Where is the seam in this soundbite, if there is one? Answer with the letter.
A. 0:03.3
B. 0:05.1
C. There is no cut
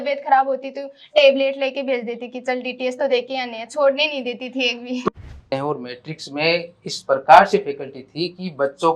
B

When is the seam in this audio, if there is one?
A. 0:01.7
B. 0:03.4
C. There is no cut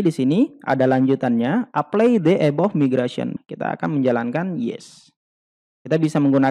B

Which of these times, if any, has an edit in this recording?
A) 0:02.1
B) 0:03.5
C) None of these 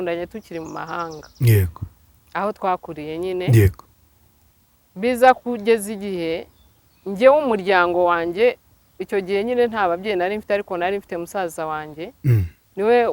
C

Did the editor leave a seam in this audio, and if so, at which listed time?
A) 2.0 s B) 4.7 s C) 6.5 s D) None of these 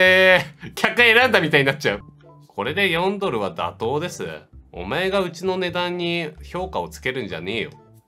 A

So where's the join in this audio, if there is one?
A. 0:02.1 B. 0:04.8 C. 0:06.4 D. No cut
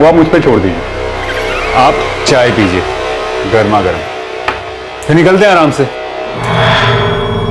C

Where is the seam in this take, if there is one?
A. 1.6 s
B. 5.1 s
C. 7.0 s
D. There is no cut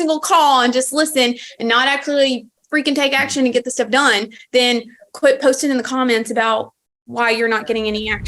D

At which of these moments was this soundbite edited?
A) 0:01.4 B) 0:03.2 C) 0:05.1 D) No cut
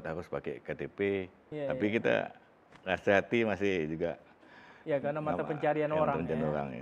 A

